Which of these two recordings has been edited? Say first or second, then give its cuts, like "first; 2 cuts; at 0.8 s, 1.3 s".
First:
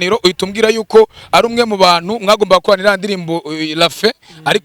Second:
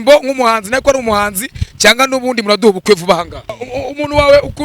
second; 1 cut; at 3.6 s